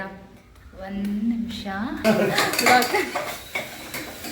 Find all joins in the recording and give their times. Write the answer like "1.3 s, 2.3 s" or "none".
2.0 s

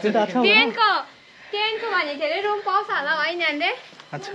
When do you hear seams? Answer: none

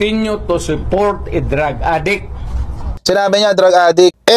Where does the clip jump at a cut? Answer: 3.0 s

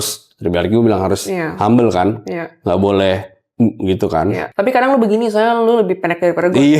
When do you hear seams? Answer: 4.4 s

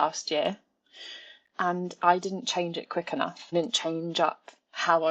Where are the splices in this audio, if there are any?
3.4 s

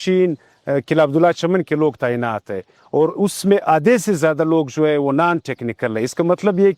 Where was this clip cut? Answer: none

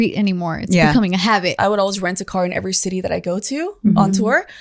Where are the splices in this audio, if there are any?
1.5 s

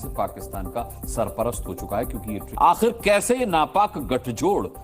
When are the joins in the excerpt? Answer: 2.5 s

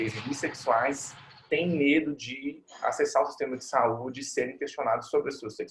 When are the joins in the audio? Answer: none

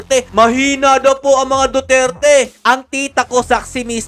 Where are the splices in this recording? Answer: 2.5 s

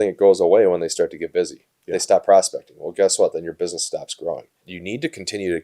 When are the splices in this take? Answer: 4.7 s

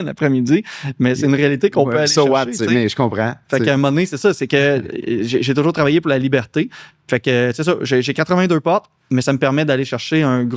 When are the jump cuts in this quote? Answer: none

